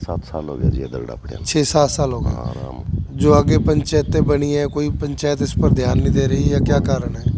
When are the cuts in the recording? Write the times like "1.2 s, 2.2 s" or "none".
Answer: none